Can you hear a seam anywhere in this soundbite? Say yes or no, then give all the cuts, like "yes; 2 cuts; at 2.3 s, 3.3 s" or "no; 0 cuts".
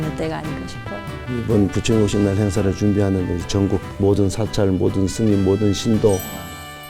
no; 0 cuts